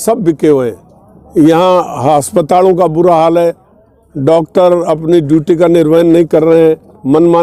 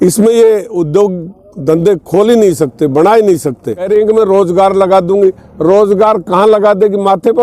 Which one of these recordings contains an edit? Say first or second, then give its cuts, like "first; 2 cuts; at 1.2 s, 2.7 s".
second; 1 cut; at 3.9 s